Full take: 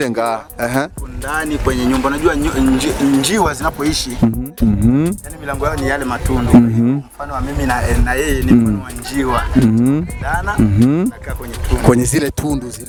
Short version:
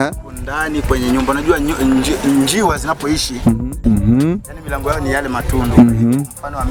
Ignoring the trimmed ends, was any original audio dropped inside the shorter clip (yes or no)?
no